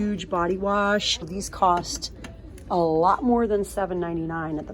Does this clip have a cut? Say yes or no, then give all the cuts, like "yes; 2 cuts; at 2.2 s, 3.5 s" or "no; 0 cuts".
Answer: yes; 1 cut; at 1.4 s